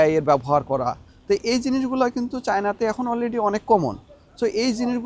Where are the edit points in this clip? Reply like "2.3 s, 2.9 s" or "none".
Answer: none